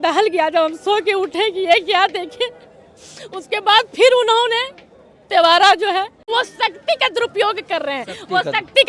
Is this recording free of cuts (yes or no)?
no